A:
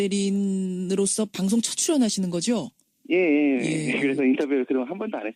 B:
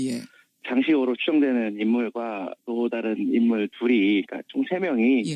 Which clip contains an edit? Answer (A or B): A